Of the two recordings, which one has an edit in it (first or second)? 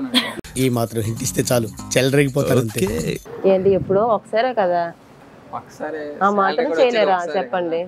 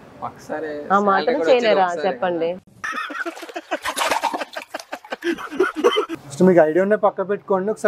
second